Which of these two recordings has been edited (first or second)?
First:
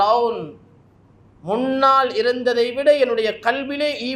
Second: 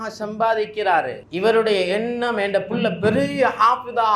second